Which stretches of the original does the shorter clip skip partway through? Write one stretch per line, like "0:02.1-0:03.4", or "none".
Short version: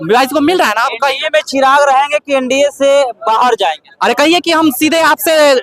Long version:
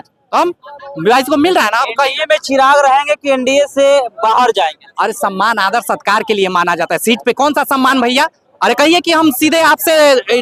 0:04.8-0:08.5